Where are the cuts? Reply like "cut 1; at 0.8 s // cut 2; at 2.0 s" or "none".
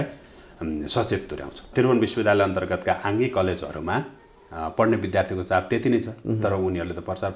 cut 1; at 1.7 s